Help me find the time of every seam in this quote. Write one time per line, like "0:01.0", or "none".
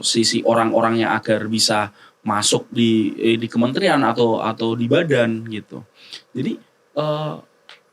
none